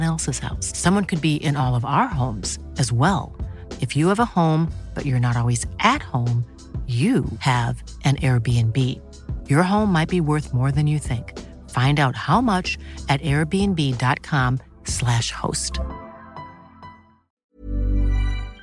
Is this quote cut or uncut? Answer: cut